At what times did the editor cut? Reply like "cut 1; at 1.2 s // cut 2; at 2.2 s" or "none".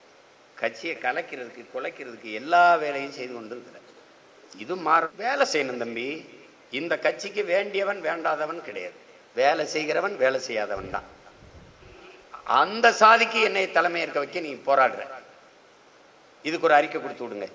cut 1; at 5.1 s // cut 2; at 11.9 s